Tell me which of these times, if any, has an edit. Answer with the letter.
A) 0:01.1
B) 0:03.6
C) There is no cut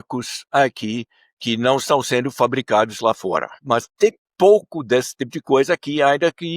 B